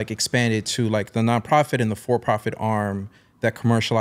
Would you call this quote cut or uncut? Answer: uncut